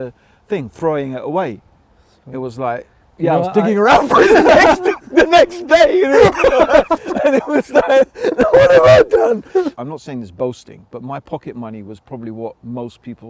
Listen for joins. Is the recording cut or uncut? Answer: cut